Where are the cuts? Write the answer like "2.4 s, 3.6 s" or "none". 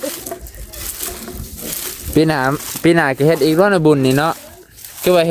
none